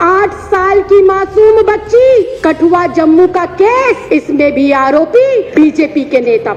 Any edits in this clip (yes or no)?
yes